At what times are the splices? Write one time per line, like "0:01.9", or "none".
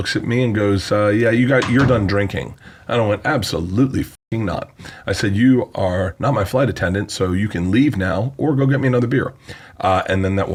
none